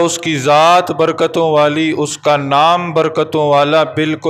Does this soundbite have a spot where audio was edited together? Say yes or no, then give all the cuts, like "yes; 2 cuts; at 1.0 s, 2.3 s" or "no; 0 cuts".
no; 0 cuts